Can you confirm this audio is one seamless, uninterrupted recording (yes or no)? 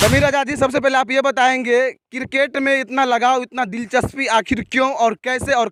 yes